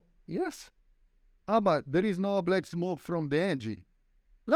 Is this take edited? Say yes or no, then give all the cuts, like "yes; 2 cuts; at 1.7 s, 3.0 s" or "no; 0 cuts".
no; 0 cuts